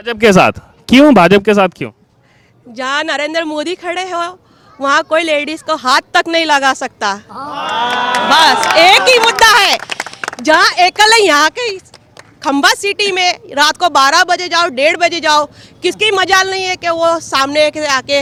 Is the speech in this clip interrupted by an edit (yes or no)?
no